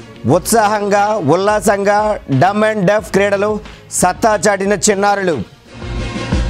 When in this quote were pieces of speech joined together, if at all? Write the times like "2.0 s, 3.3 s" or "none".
none